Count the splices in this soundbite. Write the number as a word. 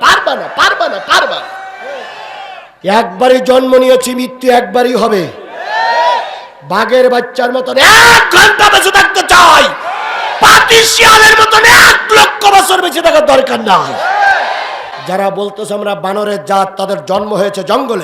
two